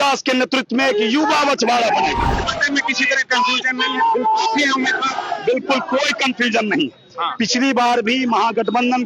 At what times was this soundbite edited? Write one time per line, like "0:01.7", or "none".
0:02.4

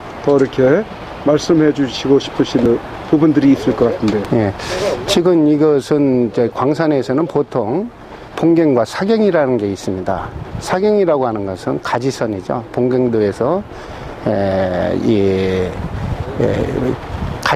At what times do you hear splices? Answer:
0:01.0

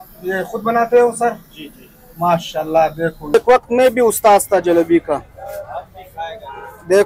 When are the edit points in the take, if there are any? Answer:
0:03.3

